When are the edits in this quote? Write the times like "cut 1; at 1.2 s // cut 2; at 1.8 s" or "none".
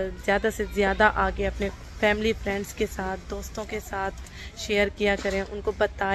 none